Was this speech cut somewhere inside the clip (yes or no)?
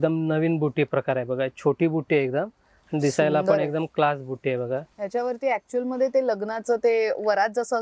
yes